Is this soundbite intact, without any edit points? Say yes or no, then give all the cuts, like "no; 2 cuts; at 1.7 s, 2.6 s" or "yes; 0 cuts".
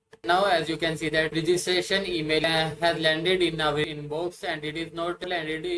no; 1 cut; at 3.9 s